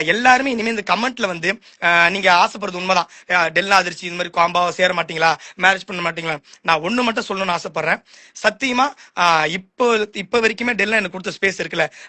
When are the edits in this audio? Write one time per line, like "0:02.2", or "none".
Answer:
none

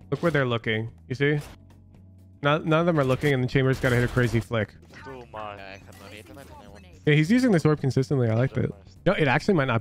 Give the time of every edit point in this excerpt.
0:04.9

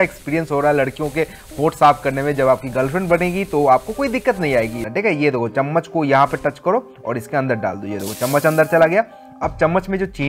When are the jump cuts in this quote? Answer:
0:04.9

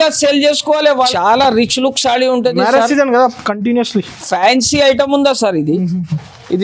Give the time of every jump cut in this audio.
0:01.1

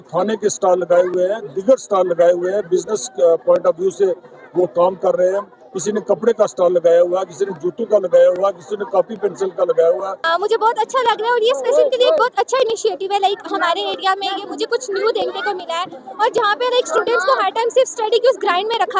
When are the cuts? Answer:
0:10.1

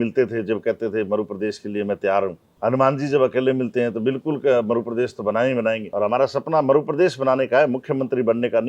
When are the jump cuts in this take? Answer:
0:02.5
0:05.9

